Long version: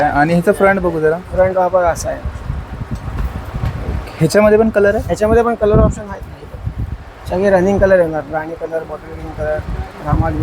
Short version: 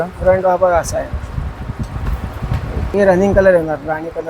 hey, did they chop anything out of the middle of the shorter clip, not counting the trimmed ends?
yes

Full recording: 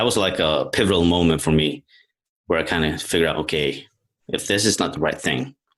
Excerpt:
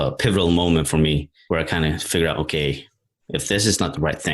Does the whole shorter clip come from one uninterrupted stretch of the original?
no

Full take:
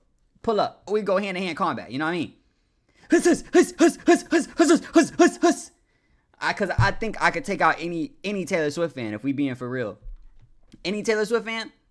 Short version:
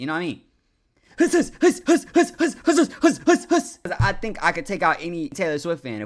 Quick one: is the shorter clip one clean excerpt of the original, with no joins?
no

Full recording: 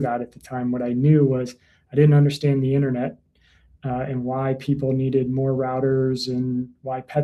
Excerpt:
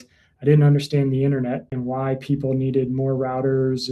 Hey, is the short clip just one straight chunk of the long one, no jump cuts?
no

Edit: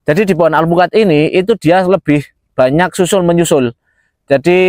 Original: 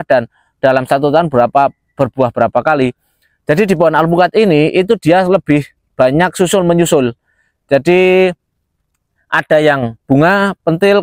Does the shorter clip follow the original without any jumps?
yes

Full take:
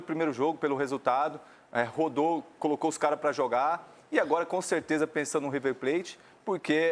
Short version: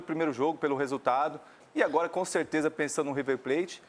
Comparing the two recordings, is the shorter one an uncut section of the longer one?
no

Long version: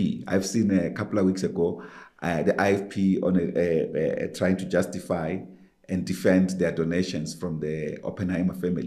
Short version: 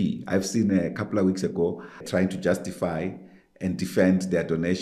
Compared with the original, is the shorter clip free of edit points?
no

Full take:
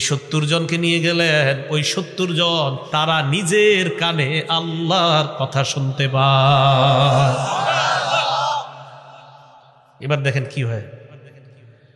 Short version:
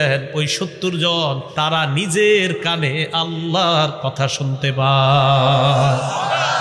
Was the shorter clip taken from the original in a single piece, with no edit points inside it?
yes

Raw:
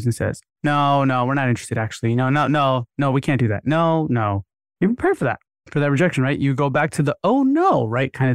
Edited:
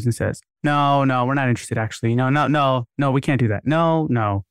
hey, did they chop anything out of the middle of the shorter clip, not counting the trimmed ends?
no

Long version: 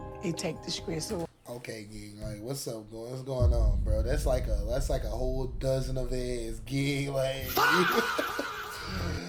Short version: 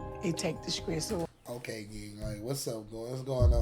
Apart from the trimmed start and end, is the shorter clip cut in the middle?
no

